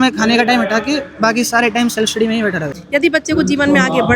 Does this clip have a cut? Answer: yes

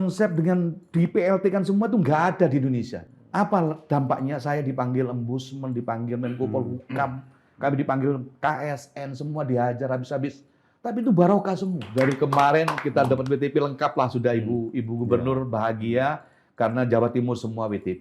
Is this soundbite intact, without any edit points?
no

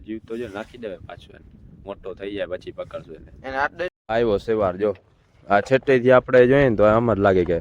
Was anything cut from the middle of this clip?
yes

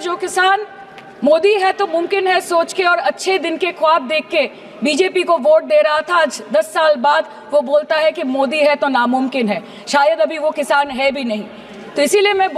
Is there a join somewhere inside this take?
no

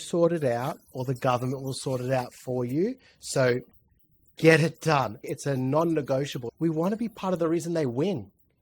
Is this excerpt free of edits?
no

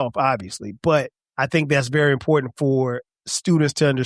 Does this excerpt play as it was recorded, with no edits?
no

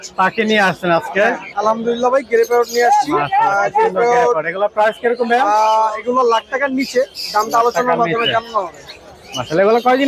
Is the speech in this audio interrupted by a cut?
no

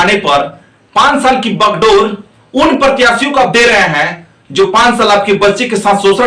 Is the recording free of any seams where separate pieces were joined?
yes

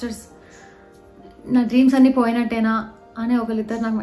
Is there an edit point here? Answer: no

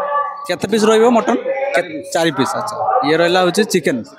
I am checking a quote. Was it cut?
no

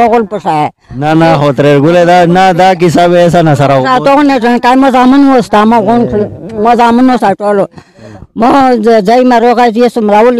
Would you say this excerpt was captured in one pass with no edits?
yes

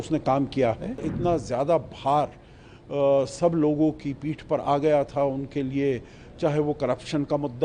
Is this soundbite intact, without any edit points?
no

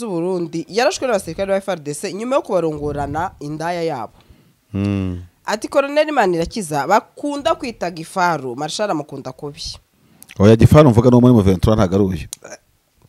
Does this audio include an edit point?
no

